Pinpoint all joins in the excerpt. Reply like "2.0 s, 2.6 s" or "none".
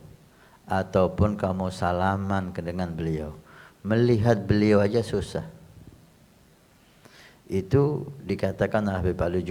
none